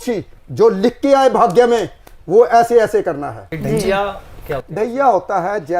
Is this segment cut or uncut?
cut